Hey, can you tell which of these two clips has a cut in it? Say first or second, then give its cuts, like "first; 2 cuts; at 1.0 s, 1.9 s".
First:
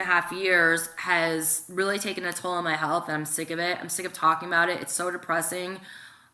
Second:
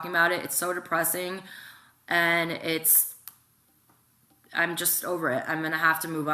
first; 1 cut; at 1.2 s